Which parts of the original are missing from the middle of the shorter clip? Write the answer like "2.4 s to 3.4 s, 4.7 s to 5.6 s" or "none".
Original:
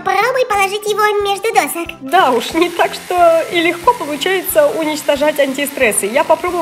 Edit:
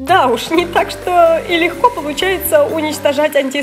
none